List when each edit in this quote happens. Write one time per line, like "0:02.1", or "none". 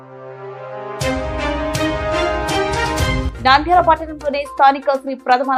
none